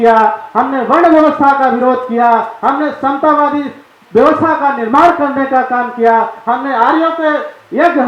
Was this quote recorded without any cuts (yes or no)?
yes